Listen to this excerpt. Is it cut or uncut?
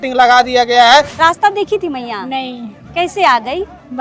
cut